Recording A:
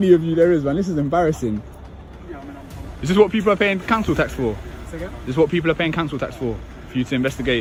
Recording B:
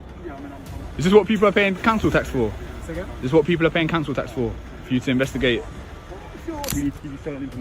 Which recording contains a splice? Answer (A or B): B